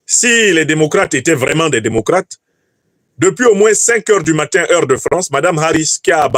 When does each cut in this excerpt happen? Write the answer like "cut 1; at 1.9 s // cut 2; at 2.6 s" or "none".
none